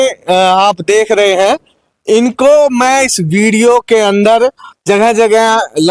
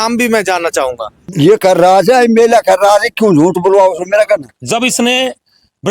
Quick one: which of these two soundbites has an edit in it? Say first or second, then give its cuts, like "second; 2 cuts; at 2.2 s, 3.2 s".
second; 2 cuts; at 1.2 s, 4.5 s